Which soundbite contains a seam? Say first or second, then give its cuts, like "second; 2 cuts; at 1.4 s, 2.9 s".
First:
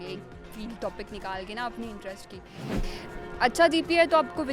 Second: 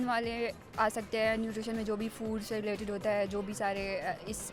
first; 1 cut; at 2.8 s